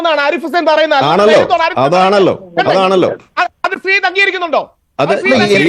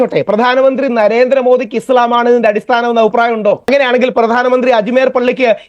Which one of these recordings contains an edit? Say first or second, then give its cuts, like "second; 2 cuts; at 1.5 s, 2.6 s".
second; 1 cut; at 3.6 s